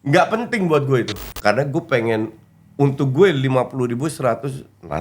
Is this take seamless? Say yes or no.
no